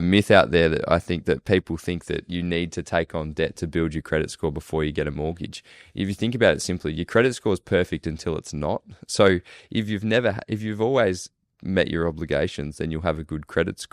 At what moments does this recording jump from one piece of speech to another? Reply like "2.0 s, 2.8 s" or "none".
none